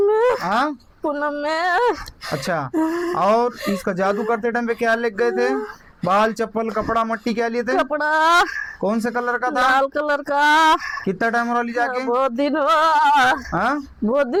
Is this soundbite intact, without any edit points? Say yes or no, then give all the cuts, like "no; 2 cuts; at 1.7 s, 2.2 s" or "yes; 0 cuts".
yes; 0 cuts